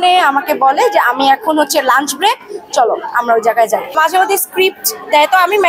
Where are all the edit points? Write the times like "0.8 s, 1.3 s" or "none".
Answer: 4.0 s